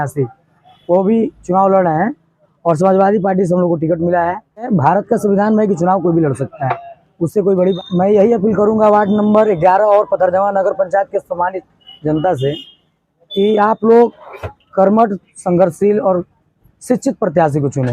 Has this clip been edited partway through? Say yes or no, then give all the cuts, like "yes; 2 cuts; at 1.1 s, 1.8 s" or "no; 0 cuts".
yes; 2 cuts; at 4.7 s, 7.8 s